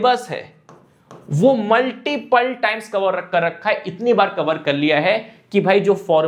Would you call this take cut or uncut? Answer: uncut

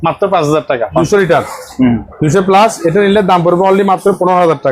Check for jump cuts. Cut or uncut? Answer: cut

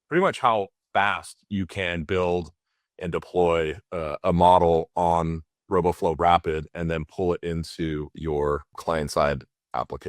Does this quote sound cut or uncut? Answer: cut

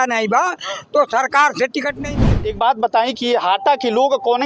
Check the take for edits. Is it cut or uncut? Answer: cut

